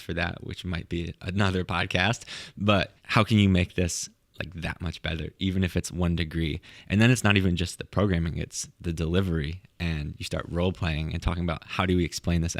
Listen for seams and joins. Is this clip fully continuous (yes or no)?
no